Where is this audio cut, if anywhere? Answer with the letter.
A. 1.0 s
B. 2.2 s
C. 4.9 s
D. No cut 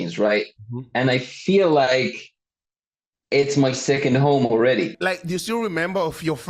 C